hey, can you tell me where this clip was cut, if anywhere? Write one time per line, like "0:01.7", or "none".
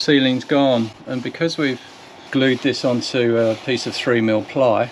none